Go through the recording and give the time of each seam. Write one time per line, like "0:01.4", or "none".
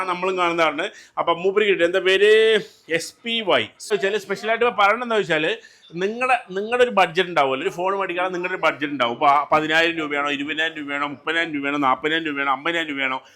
0:03.9